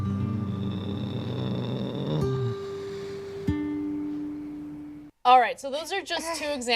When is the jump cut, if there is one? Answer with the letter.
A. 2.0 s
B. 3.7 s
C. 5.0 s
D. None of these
C